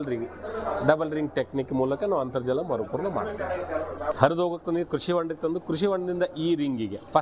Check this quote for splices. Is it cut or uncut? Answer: cut